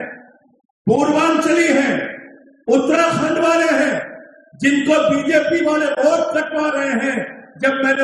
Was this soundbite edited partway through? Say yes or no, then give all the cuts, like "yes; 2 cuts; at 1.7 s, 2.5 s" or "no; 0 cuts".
no; 0 cuts